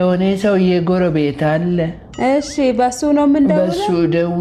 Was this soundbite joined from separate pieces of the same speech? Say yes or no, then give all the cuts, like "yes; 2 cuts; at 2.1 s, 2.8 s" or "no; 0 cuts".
no; 0 cuts